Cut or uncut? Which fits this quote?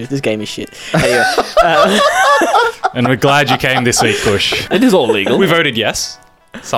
cut